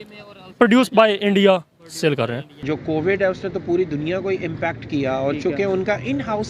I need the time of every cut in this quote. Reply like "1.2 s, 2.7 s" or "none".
2.5 s